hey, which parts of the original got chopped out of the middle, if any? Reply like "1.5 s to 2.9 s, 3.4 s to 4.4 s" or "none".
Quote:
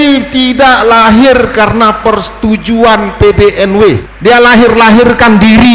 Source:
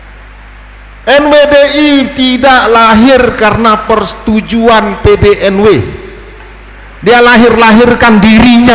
5.9 s to 6.9 s